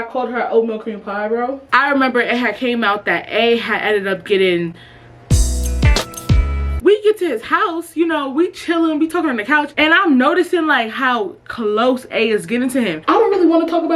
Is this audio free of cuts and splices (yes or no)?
no